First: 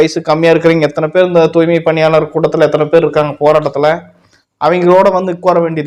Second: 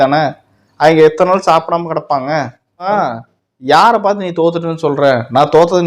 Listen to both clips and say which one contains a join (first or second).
second